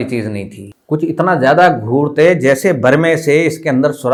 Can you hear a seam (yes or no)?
no